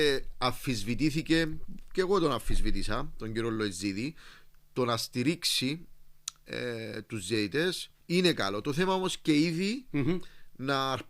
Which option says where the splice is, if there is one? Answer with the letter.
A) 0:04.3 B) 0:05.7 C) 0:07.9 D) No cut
C